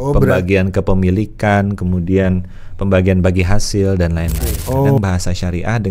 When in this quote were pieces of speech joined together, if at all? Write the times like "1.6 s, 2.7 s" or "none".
5.0 s